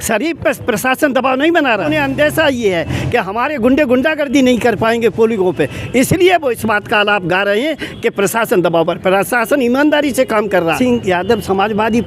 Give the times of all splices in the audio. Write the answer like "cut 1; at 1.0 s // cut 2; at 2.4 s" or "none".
cut 1; at 1.8 s // cut 2; at 10.8 s